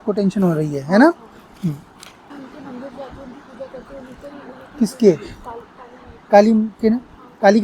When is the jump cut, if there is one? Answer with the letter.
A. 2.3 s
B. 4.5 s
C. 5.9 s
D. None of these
A